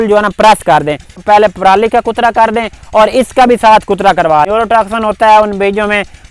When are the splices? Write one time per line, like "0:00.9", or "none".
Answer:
0:01.2
0:04.5